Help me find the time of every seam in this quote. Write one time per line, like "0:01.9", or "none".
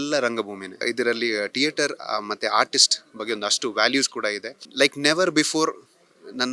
0:00.8
0:04.6